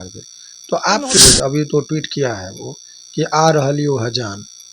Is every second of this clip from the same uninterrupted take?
no; 1 cut; at 1.2 s

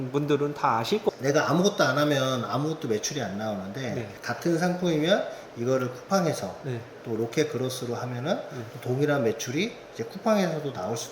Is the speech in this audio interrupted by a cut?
yes; 1 cut; at 1.1 s

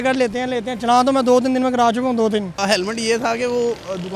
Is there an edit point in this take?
yes; 1 cut; at 2.6 s

